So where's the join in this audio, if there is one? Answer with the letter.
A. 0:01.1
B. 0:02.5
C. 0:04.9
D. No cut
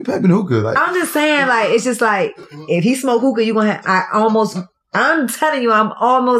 B